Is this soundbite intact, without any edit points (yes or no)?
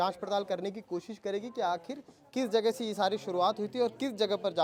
yes